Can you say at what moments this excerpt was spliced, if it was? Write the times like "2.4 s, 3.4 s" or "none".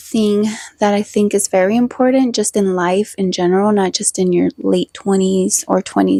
none